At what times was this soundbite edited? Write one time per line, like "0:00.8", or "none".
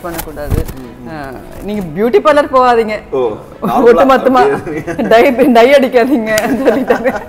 none